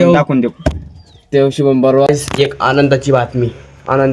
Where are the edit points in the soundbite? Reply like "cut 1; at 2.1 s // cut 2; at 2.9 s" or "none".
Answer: cut 1; at 2.1 s